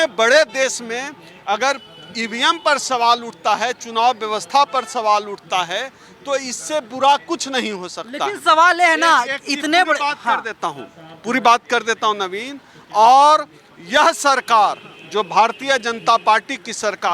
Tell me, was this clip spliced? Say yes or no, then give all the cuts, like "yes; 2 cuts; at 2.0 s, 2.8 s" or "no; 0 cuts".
no; 0 cuts